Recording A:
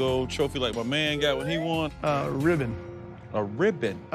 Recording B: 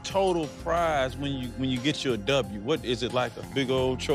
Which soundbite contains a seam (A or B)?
A